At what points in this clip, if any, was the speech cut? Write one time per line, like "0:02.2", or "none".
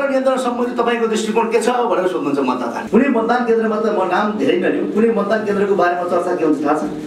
0:02.8